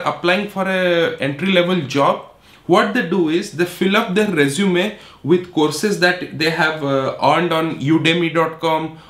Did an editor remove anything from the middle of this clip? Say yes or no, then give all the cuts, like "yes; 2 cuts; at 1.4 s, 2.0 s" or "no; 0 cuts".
no; 0 cuts